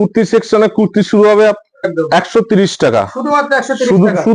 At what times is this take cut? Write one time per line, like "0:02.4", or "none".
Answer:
0:01.9